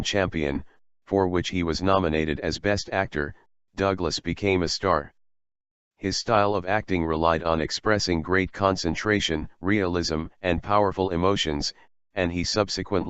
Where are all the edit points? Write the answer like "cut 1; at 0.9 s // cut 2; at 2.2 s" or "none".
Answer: cut 1; at 8.2 s